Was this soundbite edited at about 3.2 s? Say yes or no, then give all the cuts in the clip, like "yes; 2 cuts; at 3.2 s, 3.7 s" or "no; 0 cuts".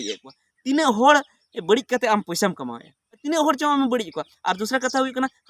yes; 1 cut; at 3.2 s